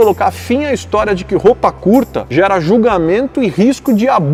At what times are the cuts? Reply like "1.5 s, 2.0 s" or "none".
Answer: none